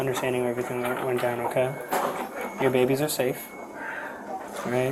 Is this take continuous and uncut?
yes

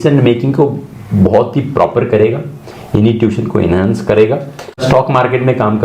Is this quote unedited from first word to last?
no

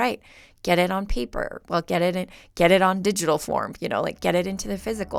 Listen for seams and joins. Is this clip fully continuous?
yes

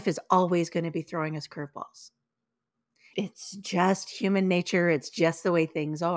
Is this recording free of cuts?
no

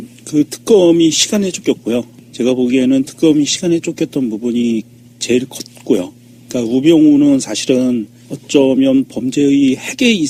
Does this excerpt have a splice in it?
no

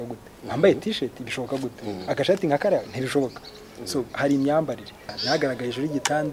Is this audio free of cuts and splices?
no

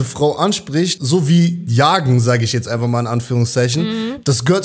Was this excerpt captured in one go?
no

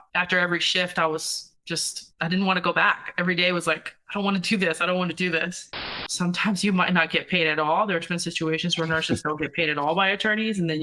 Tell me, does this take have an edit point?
yes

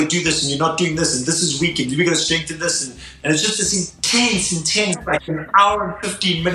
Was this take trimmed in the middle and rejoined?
yes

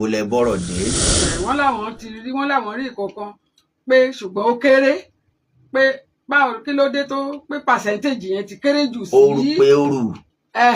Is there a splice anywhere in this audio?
yes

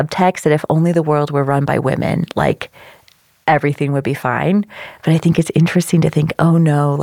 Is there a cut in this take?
no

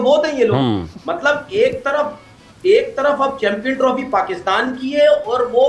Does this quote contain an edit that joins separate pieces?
no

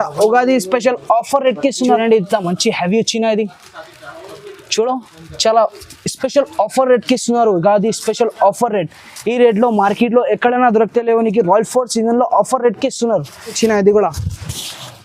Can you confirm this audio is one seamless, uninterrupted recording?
no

